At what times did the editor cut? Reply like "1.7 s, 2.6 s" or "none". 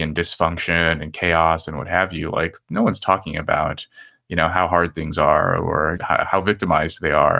6.0 s

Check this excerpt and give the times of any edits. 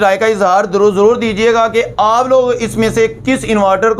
none

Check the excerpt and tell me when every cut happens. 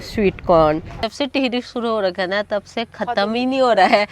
1.0 s

